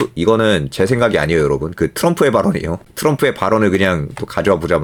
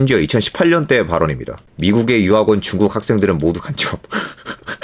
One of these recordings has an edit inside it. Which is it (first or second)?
second